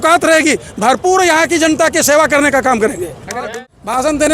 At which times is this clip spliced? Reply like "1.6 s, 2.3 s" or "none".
3.3 s